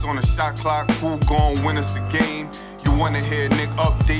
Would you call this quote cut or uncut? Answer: uncut